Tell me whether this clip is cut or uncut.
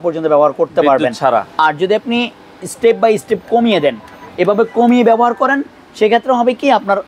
uncut